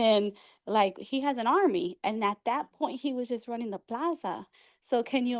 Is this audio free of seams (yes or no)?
yes